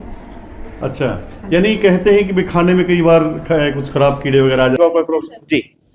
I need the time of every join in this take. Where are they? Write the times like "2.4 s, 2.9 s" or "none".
4.8 s